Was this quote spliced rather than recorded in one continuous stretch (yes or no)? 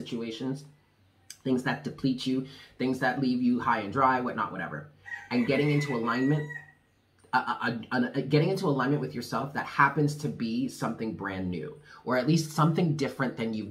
no